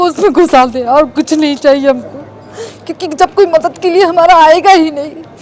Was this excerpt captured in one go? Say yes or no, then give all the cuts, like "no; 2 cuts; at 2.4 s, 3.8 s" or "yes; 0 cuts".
yes; 0 cuts